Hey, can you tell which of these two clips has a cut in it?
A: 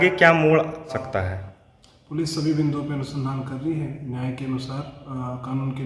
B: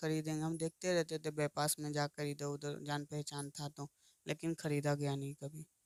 A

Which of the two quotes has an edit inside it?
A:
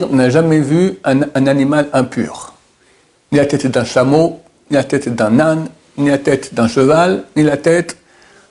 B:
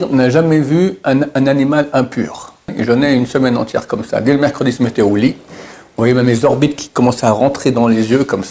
B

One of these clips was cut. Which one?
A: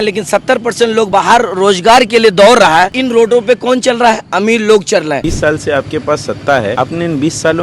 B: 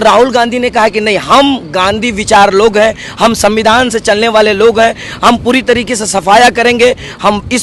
A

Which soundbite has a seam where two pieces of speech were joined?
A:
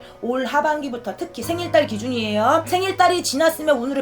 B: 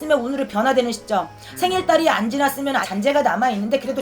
A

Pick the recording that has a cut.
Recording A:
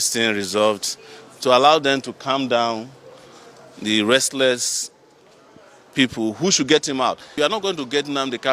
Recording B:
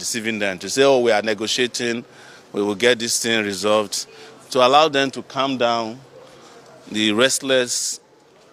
A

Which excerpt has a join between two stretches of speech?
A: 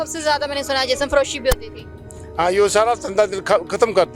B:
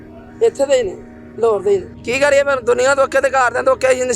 B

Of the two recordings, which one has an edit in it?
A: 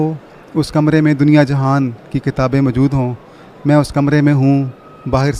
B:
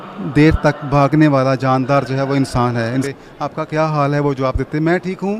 B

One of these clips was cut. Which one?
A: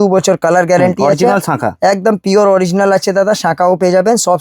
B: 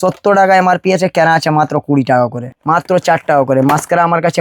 B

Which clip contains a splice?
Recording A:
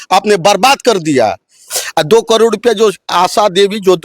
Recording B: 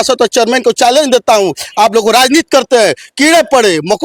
A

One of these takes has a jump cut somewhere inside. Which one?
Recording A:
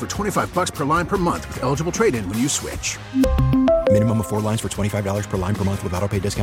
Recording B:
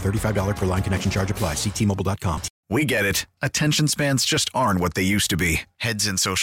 B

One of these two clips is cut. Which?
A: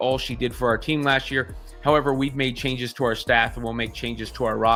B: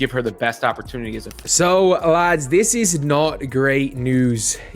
B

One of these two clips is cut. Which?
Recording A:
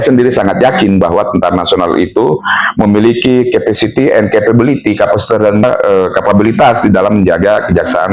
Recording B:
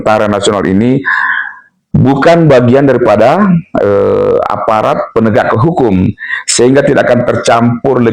A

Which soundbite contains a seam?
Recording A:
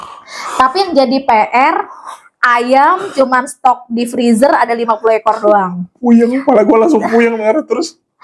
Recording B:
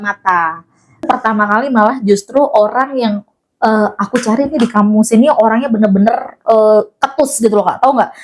B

